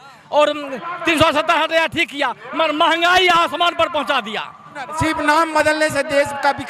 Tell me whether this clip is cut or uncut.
cut